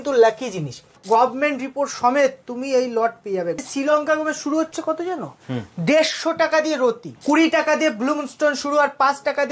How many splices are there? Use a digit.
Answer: 3